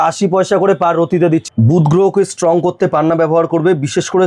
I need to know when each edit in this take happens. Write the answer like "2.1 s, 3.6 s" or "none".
1.4 s